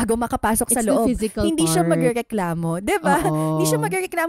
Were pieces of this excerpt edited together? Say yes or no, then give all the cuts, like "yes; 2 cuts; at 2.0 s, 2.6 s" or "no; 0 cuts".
no; 0 cuts